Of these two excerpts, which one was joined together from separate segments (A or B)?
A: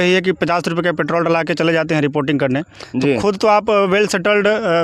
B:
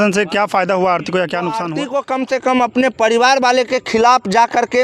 B